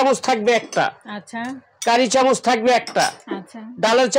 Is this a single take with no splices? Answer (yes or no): yes